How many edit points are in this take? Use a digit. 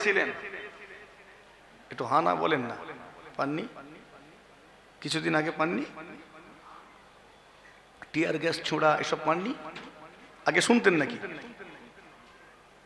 0